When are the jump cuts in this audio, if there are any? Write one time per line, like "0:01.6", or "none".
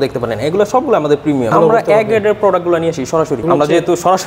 0:01.5
0:03.4

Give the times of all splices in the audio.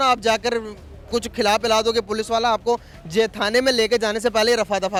none

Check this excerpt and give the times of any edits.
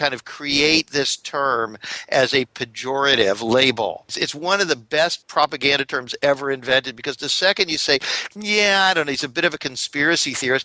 0:04.2
0:05.2

